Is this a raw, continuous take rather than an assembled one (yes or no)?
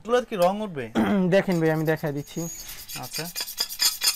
yes